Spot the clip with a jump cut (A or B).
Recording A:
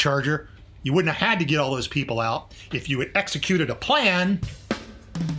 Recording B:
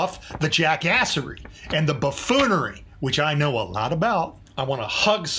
B